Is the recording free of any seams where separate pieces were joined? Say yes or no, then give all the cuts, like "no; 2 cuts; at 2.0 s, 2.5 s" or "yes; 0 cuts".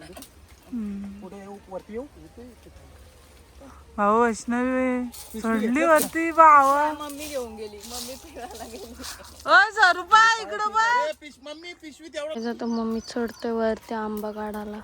no; 1 cut; at 12.3 s